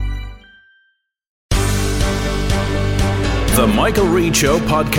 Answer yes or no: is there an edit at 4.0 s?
no